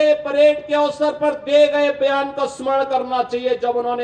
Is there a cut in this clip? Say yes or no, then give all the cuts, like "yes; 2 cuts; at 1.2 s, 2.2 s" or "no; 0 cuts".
no; 0 cuts